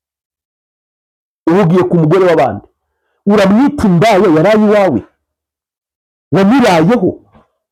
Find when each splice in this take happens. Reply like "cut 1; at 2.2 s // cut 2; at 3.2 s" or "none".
none